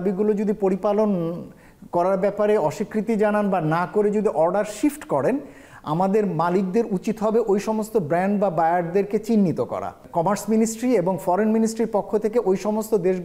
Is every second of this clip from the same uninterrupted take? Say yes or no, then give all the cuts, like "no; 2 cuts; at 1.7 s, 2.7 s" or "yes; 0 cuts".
yes; 0 cuts